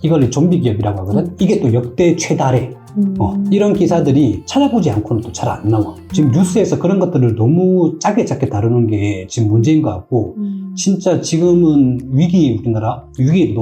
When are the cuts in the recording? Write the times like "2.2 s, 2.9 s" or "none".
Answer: 6.0 s